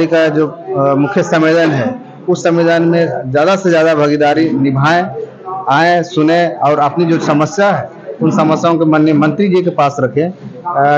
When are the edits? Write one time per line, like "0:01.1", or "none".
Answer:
none